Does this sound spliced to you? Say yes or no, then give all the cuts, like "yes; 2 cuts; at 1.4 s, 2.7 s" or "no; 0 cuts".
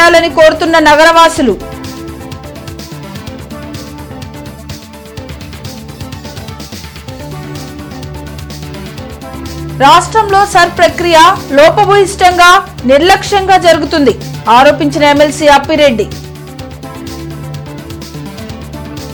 no; 0 cuts